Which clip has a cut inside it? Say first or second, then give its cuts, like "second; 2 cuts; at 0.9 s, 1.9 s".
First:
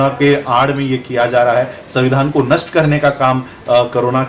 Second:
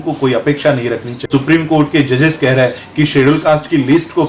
second; 1 cut; at 1.3 s